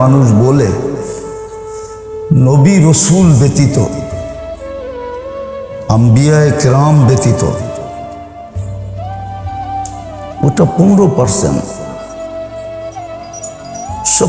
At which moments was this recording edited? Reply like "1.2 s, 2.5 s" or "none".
1.0 s, 2.3 s, 4.2 s, 5.9 s